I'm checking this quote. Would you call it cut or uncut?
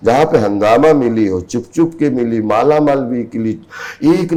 uncut